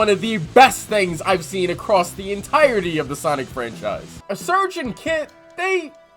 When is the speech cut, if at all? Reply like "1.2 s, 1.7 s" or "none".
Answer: 4.2 s